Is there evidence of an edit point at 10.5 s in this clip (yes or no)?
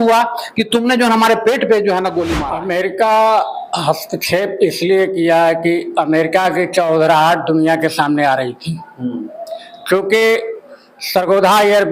no